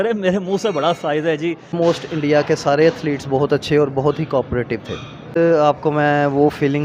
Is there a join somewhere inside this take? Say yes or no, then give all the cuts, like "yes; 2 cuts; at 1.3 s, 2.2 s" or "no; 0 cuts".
yes; 2 cuts; at 1.7 s, 5.3 s